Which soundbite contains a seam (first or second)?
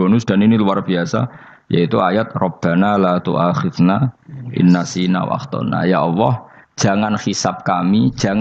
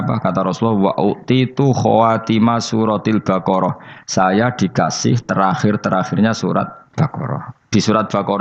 second